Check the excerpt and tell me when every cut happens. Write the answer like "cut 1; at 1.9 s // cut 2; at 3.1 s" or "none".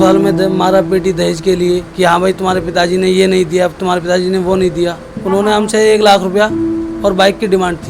cut 1; at 1.9 s // cut 2; at 5.0 s